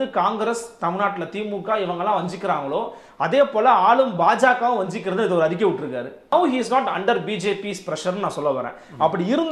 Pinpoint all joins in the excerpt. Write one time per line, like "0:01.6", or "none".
0:06.3